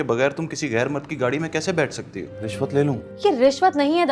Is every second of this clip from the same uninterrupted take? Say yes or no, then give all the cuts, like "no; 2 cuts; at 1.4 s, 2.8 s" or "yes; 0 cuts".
no; 1 cut; at 2.4 s